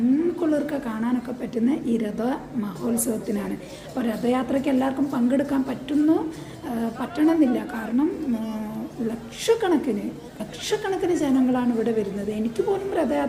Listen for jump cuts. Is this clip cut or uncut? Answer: uncut